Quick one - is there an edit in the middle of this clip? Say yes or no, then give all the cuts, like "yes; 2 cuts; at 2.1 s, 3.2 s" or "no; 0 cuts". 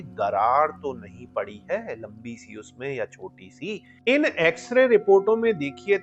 yes; 1 cut; at 3.9 s